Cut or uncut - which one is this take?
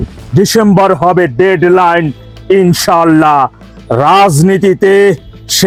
uncut